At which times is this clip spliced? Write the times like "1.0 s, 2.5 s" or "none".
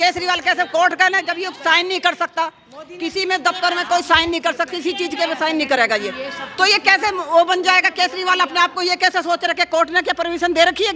none